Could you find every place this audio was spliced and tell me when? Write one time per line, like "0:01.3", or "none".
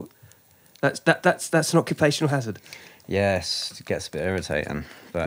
none